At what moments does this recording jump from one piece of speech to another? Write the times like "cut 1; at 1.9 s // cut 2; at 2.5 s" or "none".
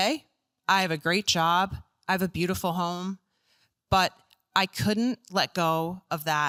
none